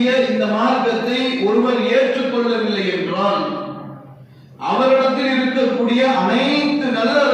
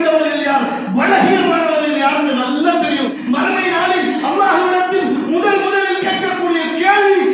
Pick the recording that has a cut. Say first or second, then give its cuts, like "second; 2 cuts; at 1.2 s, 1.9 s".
second; 1 cut; at 3.2 s